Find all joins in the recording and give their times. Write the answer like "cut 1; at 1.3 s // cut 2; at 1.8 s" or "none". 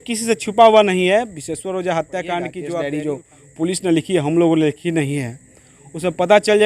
cut 1; at 2.6 s